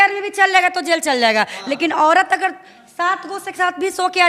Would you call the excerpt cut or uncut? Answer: uncut